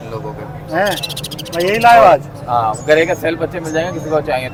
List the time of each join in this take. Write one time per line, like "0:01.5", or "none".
none

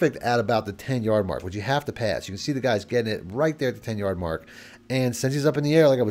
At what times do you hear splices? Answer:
none

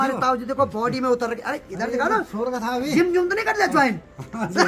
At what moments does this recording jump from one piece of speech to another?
none

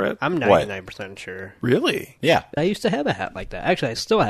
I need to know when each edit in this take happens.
0:02.5

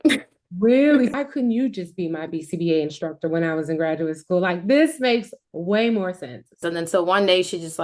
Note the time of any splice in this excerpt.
0:01.1
0:06.6

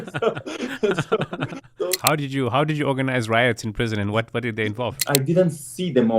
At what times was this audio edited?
0:02.0
0:05.0

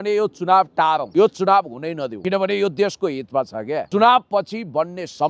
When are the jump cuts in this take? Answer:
0:01.1
0:02.1
0:03.9

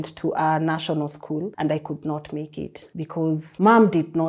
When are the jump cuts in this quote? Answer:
0:01.5
0:03.1

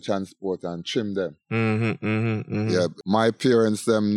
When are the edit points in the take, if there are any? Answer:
0:03.0

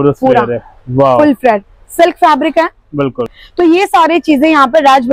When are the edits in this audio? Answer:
0:03.3

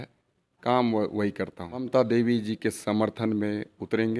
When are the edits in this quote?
0:01.9

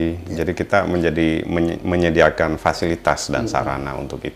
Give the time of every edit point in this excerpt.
none

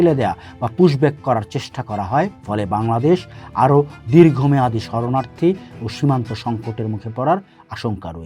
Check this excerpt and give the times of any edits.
0:02.3

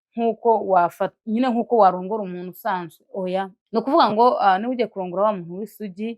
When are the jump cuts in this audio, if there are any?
0:03.6

